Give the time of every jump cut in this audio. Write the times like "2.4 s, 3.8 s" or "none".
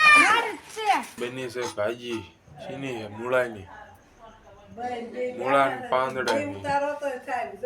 1.1 s

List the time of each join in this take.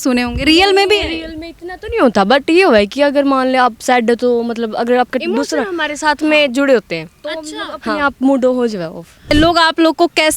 9.3 s

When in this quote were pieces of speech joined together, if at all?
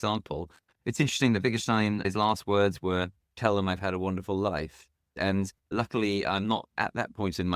5.1 s

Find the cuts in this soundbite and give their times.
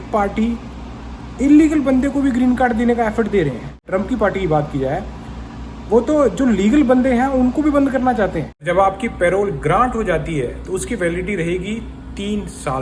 3.9 s, 8.5 s

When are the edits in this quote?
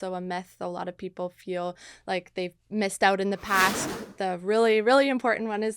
3.8 s

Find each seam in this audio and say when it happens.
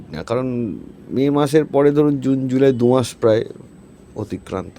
none

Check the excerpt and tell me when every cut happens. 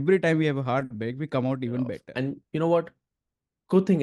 2.0 s

